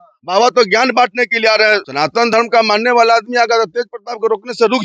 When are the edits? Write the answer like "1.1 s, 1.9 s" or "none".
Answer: 1.8 s

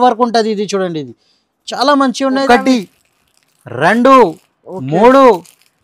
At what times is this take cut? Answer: 2.4 s

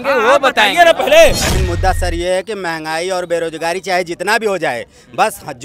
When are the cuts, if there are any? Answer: 1.5 s

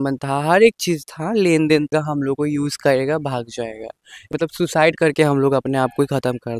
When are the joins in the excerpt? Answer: 1.9 s, 4.3 s

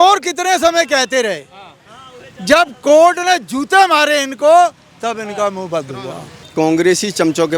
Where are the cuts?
6.4 s

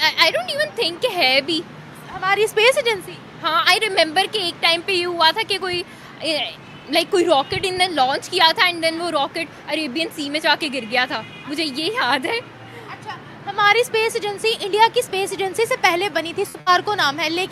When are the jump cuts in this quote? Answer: none

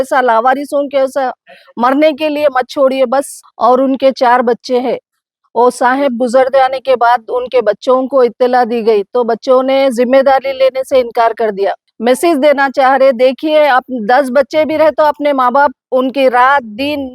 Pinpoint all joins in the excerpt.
3.4 s, 11.8 s

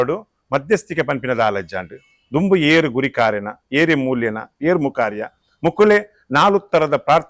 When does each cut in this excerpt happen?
none

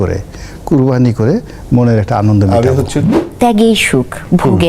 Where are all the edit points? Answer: 3.2 s

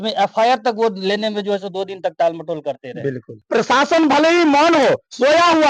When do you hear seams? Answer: 3.4 s

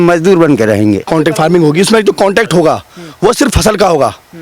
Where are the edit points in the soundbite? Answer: 1.1 s

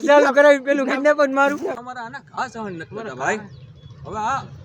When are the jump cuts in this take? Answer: 1.8 s

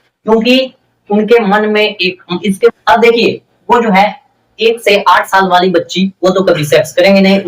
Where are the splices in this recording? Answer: 2.7 s

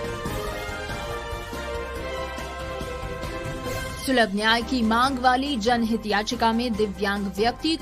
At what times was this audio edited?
4.0 s

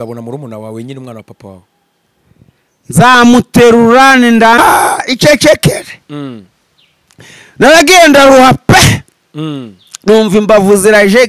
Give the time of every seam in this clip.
4.6 s

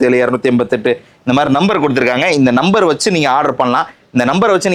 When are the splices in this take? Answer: none

